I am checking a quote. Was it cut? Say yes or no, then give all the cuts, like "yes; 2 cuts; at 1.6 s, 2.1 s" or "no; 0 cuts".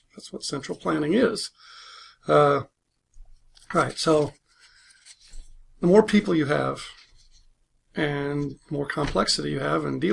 no; 0 cuts